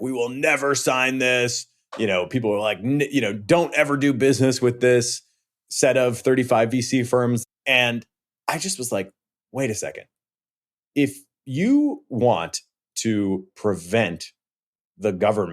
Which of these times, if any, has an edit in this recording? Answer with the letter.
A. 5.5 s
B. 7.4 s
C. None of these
B